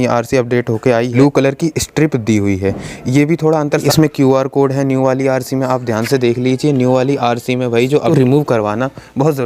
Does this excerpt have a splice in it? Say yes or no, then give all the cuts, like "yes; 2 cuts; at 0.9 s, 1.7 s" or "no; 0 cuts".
yes; 3 cuts; at 1.1 s, 3.9 s, 8.1 s